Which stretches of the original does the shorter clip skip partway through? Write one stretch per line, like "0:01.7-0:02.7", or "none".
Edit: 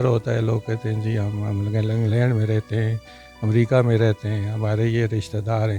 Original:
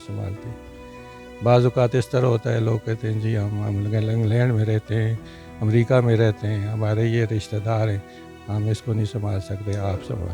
none

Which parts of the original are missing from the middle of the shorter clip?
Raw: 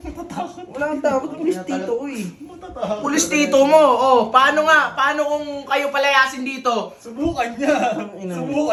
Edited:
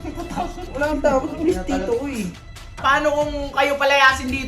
0:02.8-0:04.9

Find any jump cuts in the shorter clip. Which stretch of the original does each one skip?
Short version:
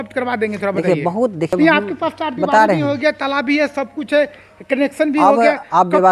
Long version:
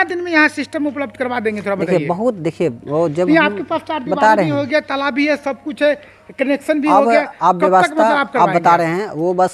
0:02.5-0:03.2

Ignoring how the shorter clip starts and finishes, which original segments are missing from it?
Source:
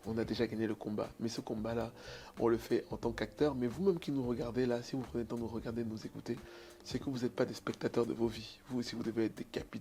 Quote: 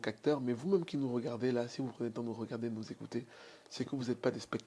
none

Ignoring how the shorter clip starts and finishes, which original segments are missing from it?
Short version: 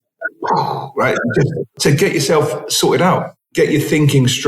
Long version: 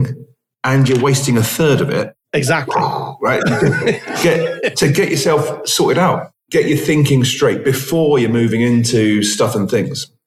0:03.9-0:04.6

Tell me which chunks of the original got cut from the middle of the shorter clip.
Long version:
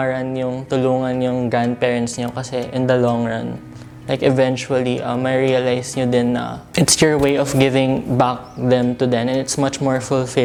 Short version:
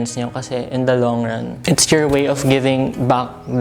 0:03.5-0:06.6

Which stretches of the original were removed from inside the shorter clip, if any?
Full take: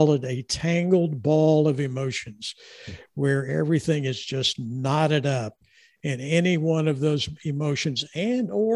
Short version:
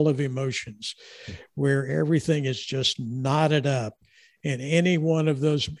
none

